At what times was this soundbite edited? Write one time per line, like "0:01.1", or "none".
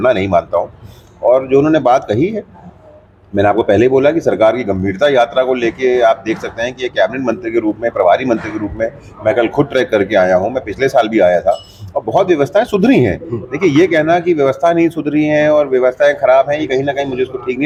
none

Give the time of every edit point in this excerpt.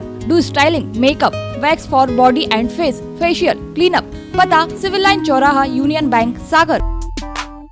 0:06.8

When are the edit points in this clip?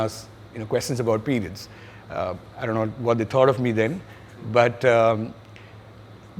none

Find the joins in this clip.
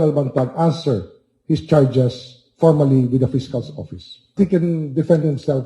0:04.4

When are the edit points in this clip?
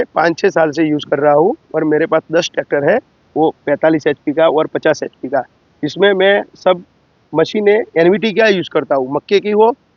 none

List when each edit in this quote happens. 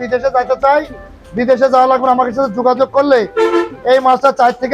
none

